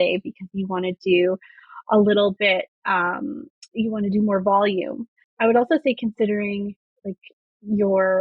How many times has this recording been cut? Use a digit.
1